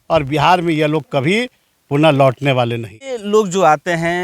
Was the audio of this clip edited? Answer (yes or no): yes